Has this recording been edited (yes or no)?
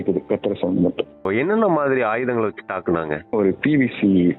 yes